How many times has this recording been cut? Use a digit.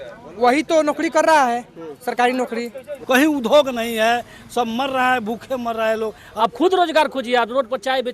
2